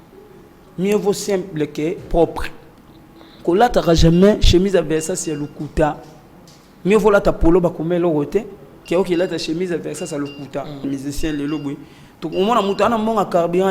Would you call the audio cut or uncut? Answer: cut